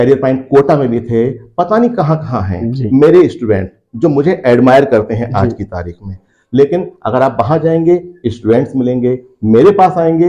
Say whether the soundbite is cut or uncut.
uncut